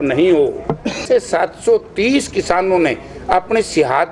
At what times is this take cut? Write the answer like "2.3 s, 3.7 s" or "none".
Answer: 1.0 s